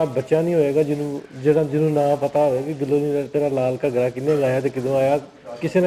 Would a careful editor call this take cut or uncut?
uncut